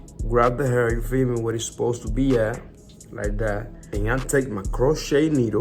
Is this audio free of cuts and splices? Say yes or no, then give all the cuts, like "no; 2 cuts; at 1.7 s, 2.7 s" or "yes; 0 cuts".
no; 1 cut; at 3.8 s